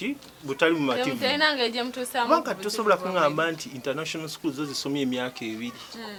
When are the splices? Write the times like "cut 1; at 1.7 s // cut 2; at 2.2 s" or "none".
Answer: none

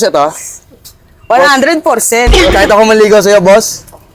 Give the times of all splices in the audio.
cut 1; at 2.5 s

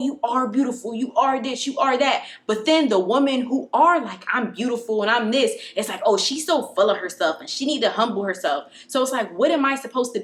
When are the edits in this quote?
none

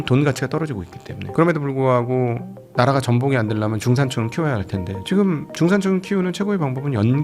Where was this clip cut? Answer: cut 1; at 1.2 s // cut 2; at 4.9 s

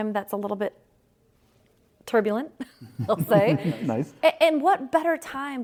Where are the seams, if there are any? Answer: none

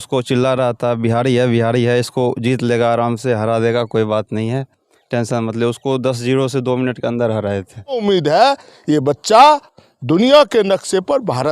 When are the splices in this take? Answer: cut 1; at 8.0 s

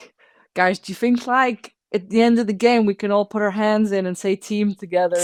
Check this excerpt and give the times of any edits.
none

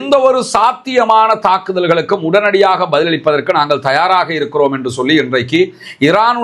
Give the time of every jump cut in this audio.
none

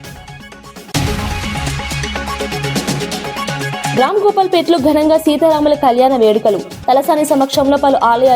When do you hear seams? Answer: cut 1; at 0.9 s // cut 2; at 3.9 s

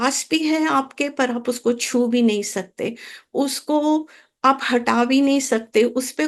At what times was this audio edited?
none

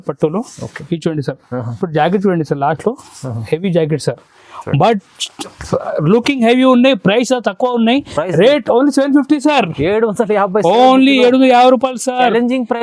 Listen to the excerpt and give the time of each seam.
none

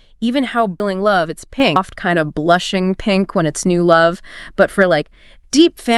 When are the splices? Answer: cut 1; at 0.8 s // cut 2; at 1.8 s

